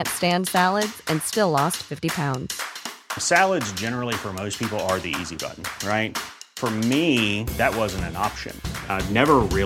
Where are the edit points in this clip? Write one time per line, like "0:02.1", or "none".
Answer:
none